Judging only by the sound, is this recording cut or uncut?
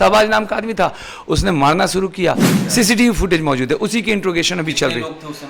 cut